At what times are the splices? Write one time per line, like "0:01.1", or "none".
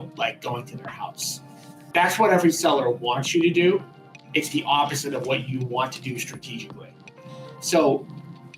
0:01.8